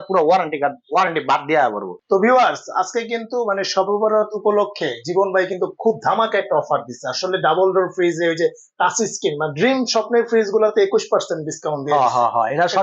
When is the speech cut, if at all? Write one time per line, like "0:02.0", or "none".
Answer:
0:01.9